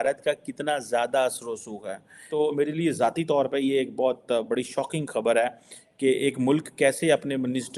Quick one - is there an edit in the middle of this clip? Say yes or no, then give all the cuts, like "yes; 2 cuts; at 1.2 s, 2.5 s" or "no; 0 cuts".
yes; 1 cut; at 2.2 s